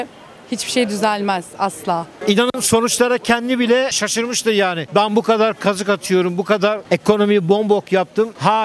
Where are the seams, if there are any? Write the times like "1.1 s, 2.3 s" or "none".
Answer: 2.2 s, 4.0 s

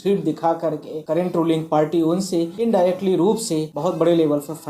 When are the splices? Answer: 0.9 s, 2.5 s, 3.7 s

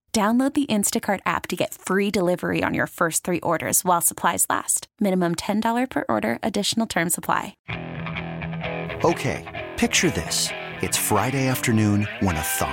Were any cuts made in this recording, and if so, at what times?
7.6 s

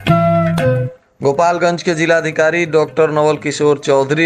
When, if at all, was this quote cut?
1.0 s

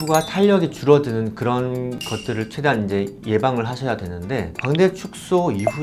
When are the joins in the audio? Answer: 4.5 s

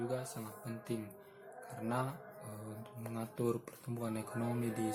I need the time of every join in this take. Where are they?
none

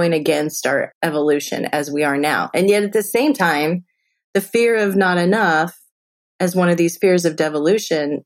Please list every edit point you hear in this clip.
0.9 s

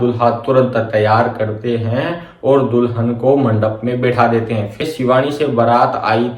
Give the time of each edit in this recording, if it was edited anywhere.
4.8 s

